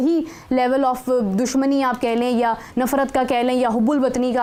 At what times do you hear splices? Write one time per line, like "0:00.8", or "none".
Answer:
none

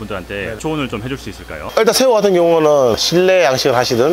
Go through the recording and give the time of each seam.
none

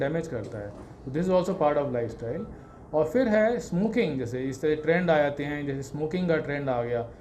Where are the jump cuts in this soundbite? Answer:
none

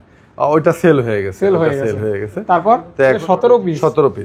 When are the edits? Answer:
0:03.2

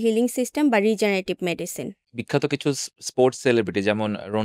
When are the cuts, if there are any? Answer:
0:02.0

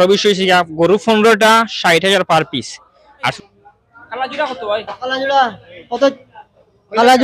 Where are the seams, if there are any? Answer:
0:03.3

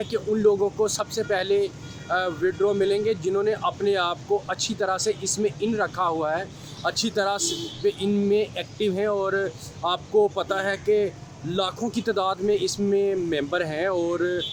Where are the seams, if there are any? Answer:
none

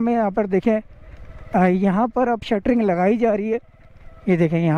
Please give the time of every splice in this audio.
none

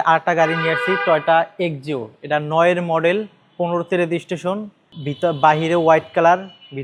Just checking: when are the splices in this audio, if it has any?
none

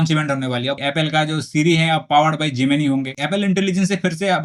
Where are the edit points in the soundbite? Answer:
0:00.8
0:03.1

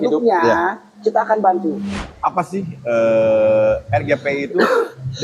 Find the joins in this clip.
0:01.9

